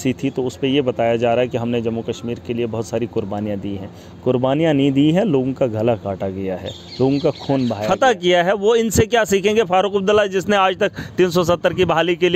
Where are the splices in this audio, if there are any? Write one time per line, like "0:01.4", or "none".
0:07.8